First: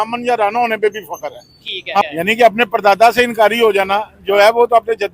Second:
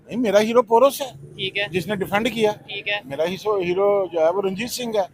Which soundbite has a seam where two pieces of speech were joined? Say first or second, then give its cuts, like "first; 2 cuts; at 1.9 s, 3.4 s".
first; 1 cut; at 2.0 s